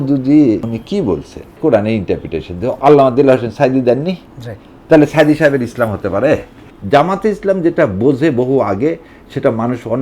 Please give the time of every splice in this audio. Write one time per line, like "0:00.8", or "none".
0:01.6
0:06.7